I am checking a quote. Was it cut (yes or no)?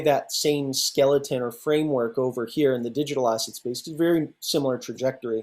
no